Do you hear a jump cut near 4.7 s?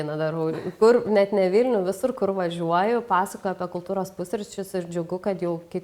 no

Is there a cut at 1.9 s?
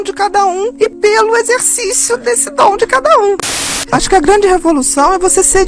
no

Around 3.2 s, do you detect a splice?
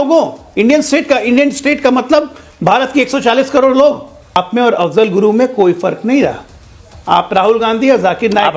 no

